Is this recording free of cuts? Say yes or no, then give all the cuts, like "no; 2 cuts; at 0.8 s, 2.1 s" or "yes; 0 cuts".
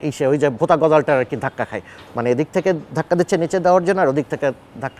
yes; 0 cuts